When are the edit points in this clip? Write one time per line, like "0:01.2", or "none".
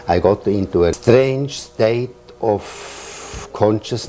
0:01.0